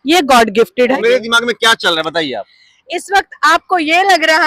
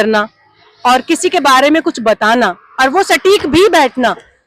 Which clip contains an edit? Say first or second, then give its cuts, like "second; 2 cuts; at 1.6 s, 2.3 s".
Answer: first; 1 cut; at 1.0 s